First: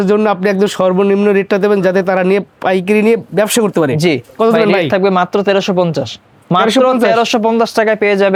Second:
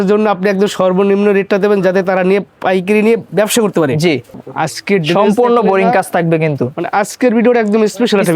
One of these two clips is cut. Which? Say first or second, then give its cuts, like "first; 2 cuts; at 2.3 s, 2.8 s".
second; 1 cut; at 4.3 s